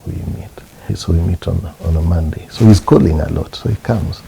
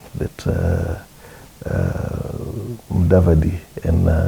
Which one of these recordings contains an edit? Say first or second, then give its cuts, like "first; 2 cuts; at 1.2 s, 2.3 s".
first; 1 cut; at 1.0 s